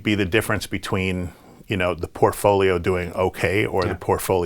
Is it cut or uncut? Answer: uncut